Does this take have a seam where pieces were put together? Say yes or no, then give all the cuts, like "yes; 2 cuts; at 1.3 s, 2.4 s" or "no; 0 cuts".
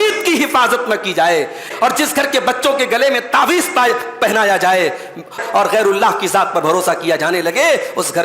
yes; 2 cuts; at 1.7 s, 5.4 s